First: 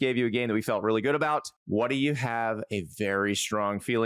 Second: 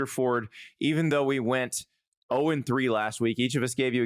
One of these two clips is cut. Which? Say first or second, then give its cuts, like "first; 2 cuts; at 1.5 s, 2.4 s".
first; 1 cut; at 1.6 s